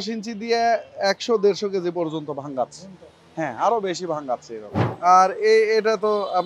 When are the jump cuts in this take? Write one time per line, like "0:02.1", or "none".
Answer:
0:04.8